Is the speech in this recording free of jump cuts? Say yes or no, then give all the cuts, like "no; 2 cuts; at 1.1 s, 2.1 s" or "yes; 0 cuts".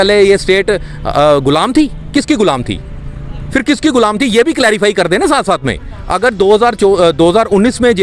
yes; 0 cuts